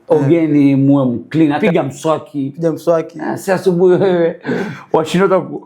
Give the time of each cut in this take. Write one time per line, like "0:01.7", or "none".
0:01.6